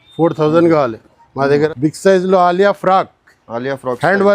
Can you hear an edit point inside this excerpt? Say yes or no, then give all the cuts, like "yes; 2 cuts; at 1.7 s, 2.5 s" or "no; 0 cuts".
yes; 1 cut; at 1.7 s